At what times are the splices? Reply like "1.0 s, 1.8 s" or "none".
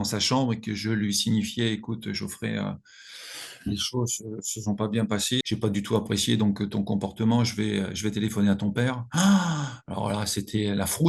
none